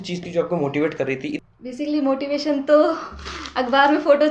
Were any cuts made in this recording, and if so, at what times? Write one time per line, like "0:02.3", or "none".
0:01.4